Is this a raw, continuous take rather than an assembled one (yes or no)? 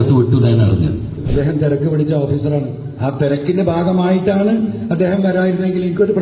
no